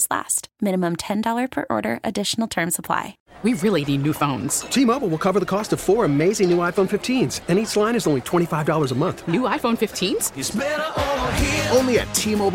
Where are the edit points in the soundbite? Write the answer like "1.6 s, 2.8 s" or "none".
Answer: 3.3 s